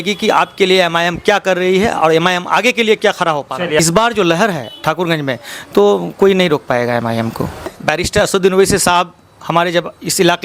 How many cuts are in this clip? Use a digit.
2